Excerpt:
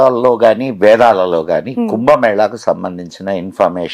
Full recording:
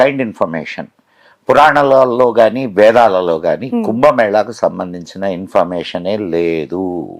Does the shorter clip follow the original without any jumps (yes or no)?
yes